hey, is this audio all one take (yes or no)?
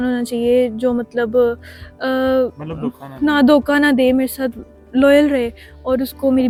yes